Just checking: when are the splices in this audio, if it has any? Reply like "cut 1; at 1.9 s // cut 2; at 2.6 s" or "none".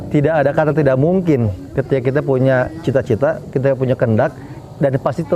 none